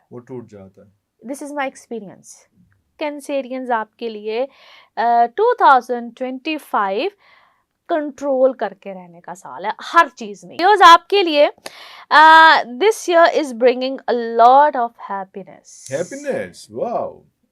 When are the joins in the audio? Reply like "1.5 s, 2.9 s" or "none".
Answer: 3.0 s, 10.5 s